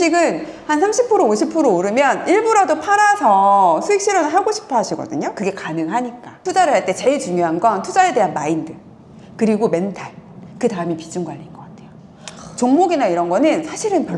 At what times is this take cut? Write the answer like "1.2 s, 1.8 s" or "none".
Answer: 6.4 s